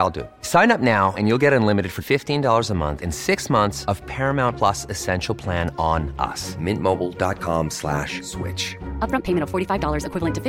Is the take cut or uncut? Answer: uncut